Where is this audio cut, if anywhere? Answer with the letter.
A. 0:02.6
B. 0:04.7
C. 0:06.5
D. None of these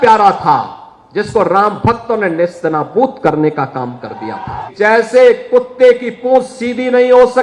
B